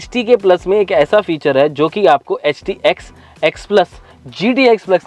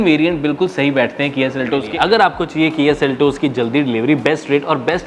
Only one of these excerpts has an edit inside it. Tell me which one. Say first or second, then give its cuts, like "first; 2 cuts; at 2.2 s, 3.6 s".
second; 1 cut; at 1.9 s